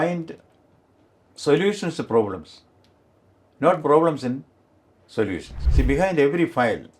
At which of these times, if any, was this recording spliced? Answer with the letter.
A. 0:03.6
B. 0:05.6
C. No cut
B